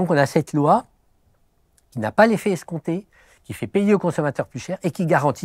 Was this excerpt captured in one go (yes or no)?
yes